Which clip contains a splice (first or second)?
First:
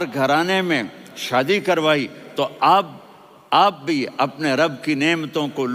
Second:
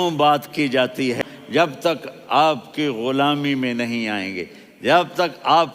second